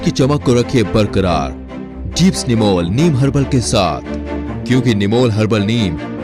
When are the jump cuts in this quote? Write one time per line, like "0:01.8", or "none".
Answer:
none

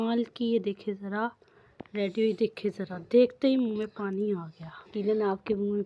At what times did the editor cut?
0:04.9

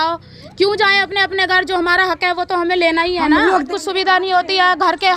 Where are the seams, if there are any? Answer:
0:03.7

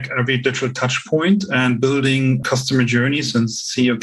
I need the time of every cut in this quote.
0:02.4

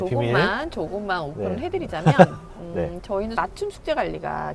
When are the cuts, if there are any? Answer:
0:03.3

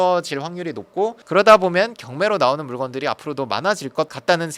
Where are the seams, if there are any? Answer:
none

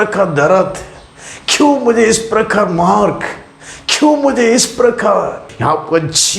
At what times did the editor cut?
0:05.5

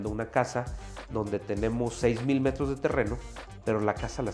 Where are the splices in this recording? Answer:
none

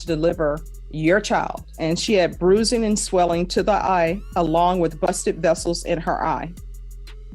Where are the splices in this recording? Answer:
0:01.7

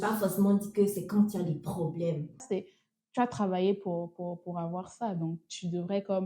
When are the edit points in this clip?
0:02.4

